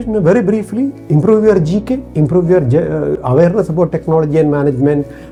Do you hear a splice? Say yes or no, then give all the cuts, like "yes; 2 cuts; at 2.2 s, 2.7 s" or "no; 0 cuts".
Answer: no; 0 cuts